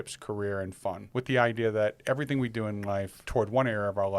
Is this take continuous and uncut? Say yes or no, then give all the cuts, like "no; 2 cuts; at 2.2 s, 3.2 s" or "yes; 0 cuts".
no; 2 cuts; at 1.0 s, 3.2 s